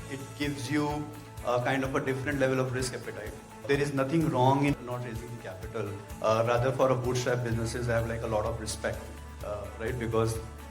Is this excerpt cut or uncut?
cut